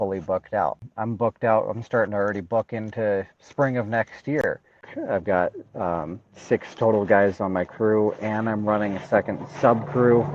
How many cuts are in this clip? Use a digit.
2